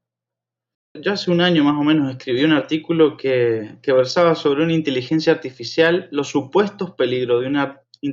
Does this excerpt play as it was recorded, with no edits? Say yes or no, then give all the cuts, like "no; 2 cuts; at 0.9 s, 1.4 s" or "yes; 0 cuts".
no; 1 cut; at 1.0 s